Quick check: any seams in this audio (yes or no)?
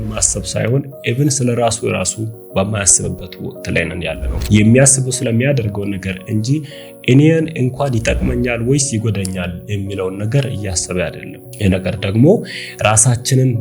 no